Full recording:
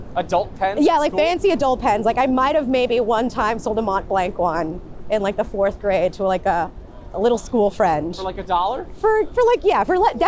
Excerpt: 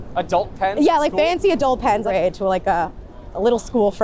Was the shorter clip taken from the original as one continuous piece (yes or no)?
no